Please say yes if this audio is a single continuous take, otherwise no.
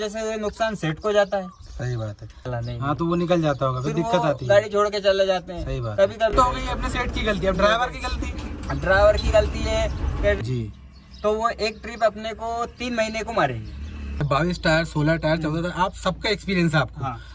no